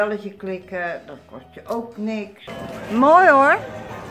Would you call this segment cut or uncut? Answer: cut